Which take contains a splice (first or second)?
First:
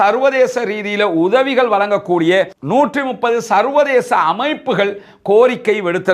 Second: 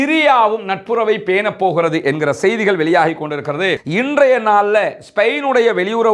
second